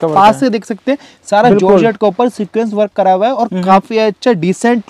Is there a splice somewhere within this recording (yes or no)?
no